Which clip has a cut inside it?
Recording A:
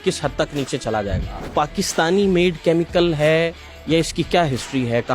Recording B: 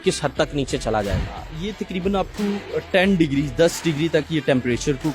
A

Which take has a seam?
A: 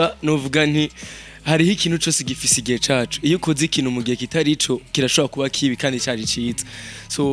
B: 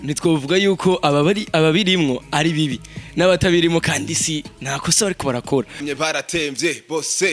B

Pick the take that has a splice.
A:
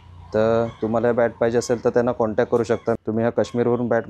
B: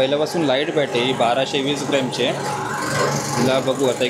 A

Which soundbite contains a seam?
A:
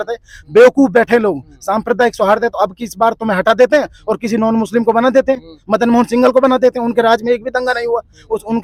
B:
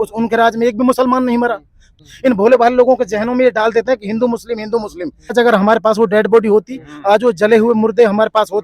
B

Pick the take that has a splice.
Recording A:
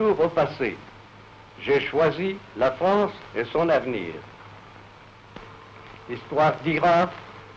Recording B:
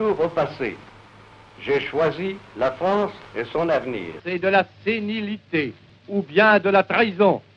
B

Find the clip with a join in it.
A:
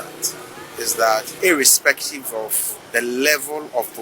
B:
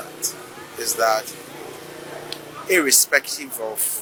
A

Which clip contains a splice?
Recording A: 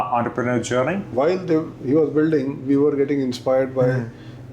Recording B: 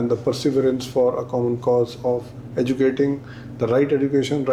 A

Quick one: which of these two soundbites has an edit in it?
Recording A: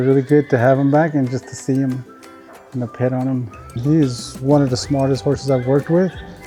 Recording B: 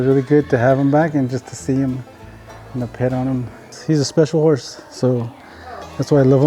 B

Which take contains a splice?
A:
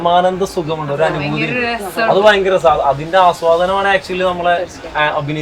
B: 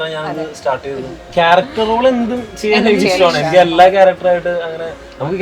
B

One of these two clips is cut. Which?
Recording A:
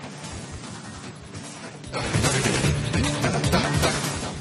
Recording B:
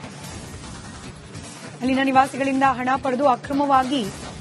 B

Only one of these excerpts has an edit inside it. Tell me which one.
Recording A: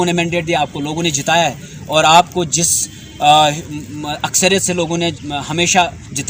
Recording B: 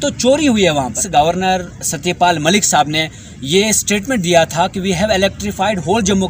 B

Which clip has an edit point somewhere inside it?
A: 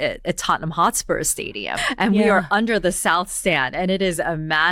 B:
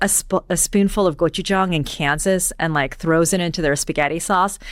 A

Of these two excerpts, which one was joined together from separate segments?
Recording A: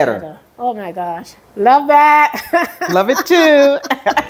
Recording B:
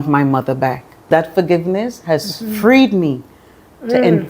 B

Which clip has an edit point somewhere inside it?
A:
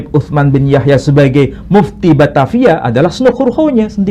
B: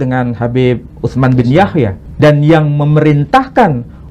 B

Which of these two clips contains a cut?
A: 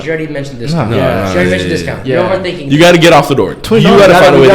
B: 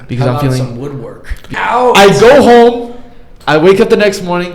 B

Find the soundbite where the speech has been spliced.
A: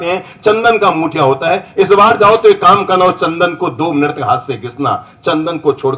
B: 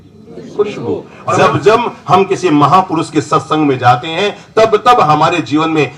B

